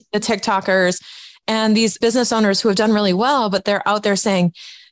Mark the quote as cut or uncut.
cut